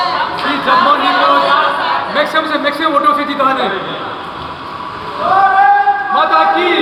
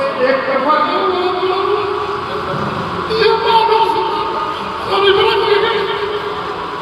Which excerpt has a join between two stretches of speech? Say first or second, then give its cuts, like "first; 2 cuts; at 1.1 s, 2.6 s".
second; 1 cut; at 0.9 s